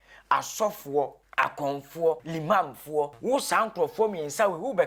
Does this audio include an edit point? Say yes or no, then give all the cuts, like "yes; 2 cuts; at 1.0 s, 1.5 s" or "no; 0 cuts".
yes; 3 cuts; at 1.2 s, 2.3 s, 3.2 s